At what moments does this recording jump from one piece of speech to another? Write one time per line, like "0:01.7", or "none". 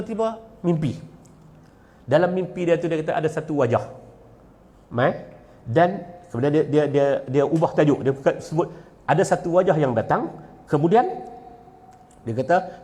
none